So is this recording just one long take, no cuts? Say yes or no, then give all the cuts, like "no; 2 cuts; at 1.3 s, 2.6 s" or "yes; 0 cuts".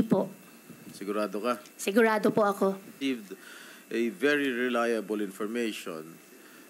no; 1 cut; at 3.0 s